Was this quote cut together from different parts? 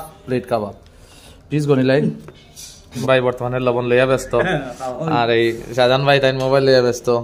yes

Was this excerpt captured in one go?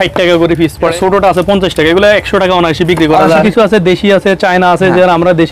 no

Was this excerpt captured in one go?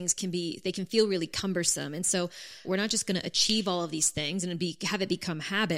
no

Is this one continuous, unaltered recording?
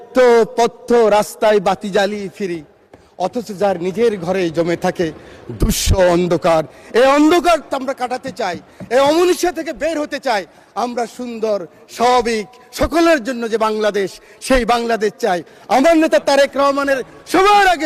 yes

